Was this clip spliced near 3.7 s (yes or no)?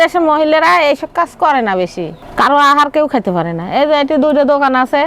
no